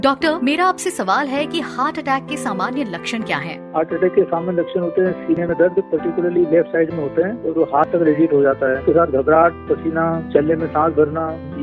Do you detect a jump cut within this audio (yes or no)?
yes